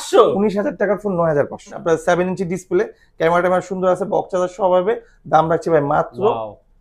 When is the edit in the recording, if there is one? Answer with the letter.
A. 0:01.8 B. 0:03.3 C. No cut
A